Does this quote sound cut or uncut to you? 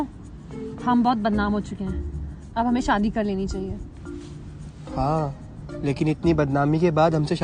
uncut